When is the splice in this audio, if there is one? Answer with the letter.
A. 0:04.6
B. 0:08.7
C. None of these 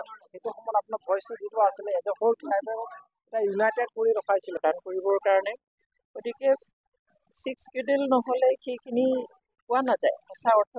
A